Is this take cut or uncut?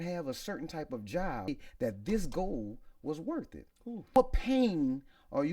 cut